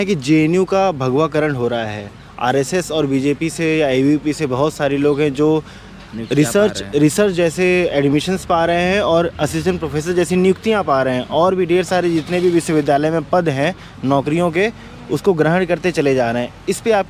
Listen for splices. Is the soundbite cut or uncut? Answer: uncut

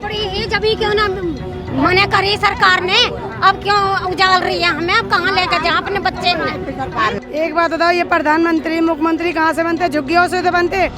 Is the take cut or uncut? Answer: cut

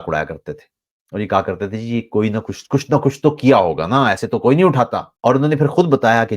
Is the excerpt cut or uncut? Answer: cut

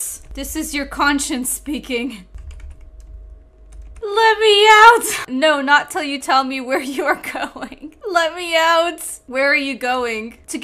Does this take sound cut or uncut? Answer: cut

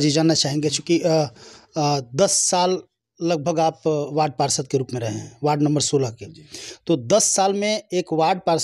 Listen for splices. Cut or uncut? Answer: uncut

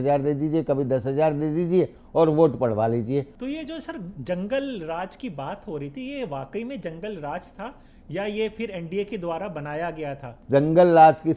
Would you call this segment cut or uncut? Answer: cut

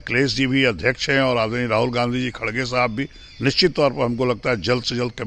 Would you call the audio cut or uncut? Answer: uncut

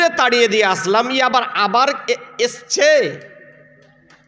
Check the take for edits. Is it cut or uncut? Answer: uncut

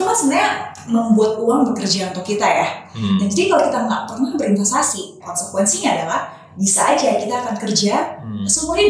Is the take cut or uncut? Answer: cut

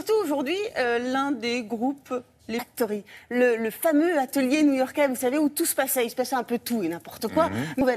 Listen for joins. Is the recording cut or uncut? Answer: uncut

